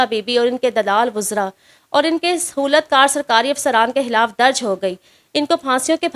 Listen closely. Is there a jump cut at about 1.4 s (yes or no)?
no